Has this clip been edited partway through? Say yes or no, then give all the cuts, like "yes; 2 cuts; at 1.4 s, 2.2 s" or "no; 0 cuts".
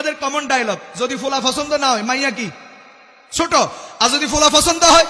no; 0 cuts